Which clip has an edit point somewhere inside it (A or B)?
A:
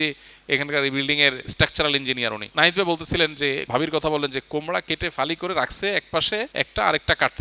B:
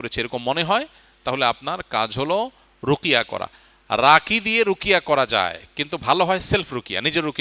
A